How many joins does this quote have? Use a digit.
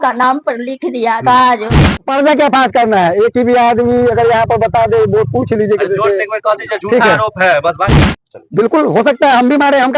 2